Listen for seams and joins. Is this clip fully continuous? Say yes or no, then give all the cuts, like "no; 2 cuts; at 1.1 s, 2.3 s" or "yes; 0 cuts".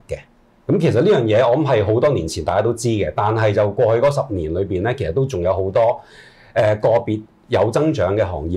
yes; 0 cuts